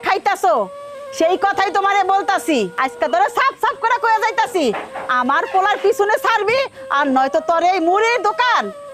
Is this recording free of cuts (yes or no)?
no